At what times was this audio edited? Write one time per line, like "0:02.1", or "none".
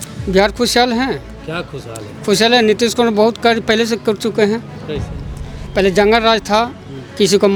none